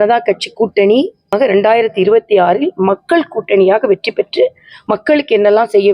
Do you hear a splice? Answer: yes; 1 cut; at 1.3 s

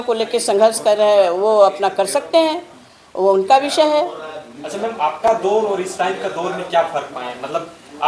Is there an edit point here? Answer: no; 0 cuts

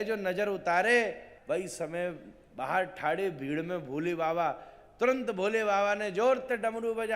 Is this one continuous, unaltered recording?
no; 1 cut; at 1.3 s

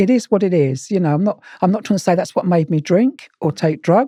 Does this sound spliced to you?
no; 0 cuts

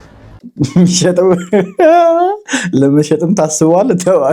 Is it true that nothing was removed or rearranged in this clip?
yes; 0 cuts

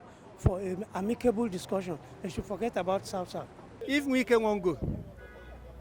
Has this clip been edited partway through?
yes; 1 cut; at 3.7 s

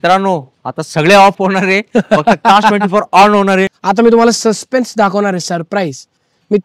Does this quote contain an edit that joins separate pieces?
yes; 1 cut; at 3.7 s

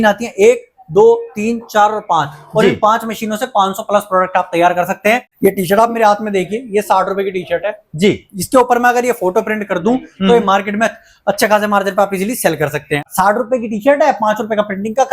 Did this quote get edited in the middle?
yes; 2 cuts; at 5.3 s, 13.1 s

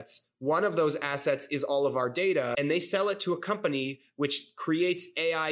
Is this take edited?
yes; 1 cut; at 2.5 s

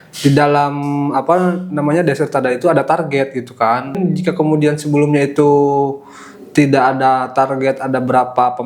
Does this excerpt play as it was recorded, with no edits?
no; 1 cut; at 4.0 s

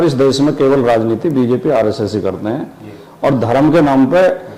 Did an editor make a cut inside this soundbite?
no; 0 cuts

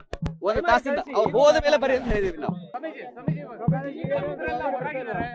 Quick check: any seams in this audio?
yes; 1 cut; at 2.7 s

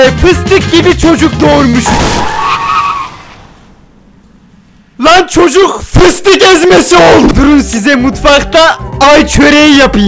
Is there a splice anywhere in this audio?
yes; 1 cut; at 7.3 s

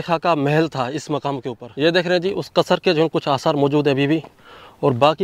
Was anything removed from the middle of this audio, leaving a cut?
yes; 1 cut; at 1.6 s

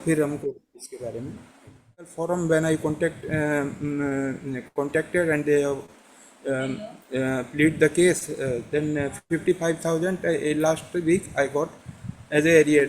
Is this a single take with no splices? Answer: no; 1 cut; at 1.9 s

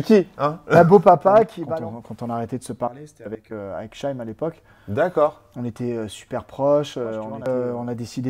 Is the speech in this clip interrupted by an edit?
yes; 2 cuts; at 1.6 s, 7.5 s

